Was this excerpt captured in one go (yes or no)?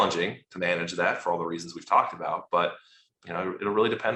yes